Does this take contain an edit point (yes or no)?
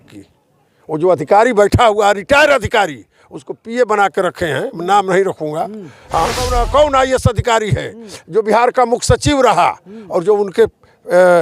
yes